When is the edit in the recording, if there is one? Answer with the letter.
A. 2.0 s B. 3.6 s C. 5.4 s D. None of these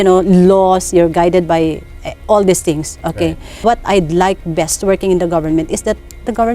B